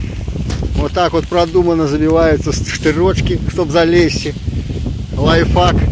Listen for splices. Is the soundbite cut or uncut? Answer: uncut